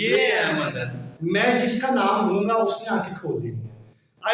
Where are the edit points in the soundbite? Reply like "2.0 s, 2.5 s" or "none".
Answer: 1.1 s